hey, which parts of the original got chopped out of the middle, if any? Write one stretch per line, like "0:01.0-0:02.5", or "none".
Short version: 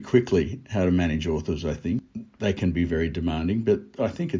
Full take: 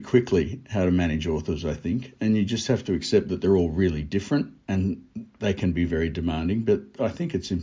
0:02.1-0:05.1